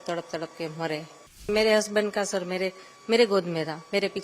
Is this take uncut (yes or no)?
no